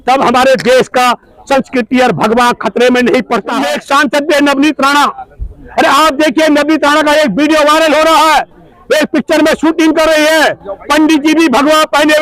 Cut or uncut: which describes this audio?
cut